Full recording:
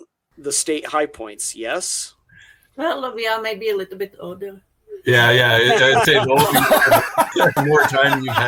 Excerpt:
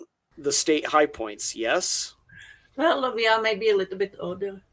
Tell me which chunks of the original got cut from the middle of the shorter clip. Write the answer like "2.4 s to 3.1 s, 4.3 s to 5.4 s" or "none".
none